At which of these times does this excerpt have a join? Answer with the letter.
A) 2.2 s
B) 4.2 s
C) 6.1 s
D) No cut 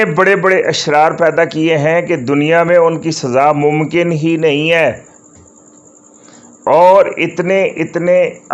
D